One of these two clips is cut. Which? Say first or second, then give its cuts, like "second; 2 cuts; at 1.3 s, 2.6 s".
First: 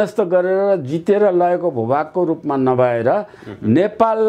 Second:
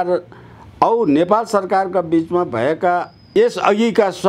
second; 1 cut; at 3.3 s